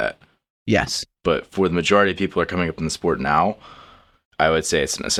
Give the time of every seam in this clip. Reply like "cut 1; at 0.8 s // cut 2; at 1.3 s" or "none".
none